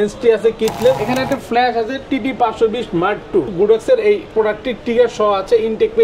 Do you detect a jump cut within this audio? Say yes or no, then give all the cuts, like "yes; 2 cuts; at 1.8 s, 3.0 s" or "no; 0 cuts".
yes; 2 cuts; at 1.0 s, 3.5 s